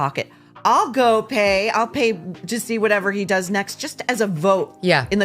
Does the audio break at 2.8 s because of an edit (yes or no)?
no